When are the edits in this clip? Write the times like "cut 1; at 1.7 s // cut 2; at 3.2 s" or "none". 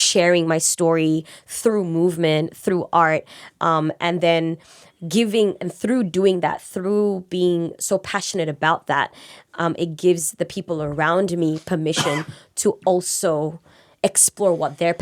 none